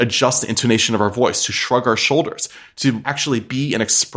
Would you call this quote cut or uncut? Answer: cut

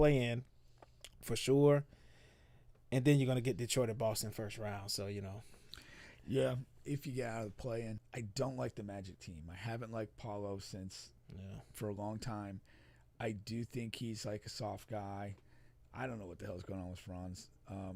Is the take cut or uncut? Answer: cut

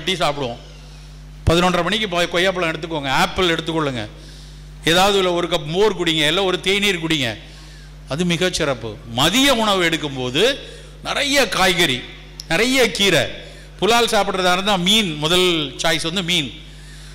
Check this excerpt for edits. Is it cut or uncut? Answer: uncut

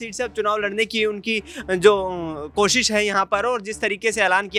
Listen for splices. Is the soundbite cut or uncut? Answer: uncut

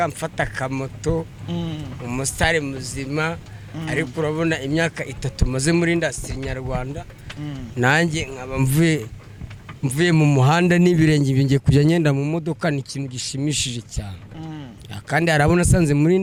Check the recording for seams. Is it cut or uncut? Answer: uncut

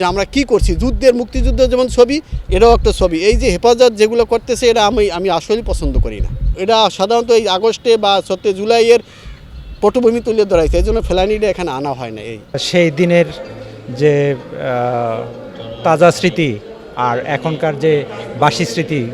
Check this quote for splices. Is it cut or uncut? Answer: cut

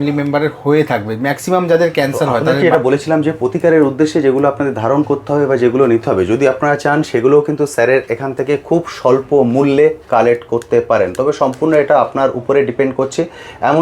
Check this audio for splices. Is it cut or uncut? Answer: cut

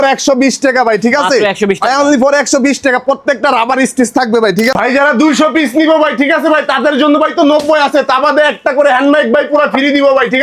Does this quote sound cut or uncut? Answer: cut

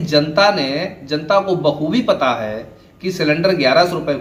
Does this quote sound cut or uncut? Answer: uncut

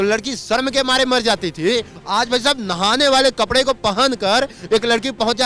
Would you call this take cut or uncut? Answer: uncut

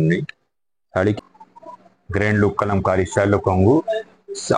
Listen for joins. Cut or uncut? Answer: cut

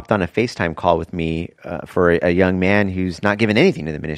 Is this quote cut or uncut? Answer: uncut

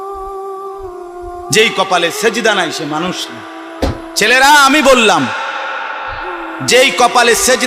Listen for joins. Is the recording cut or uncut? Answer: cut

